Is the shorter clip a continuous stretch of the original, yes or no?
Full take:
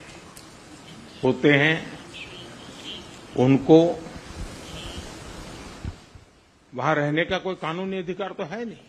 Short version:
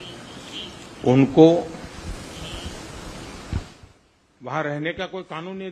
yes